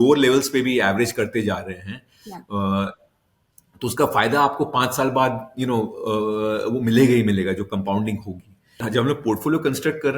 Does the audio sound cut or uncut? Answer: cut